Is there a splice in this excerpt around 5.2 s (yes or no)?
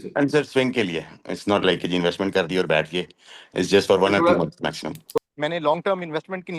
yes